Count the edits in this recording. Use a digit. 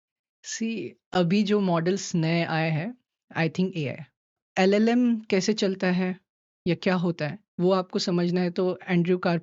1